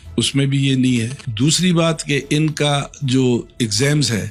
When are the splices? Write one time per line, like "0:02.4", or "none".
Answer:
none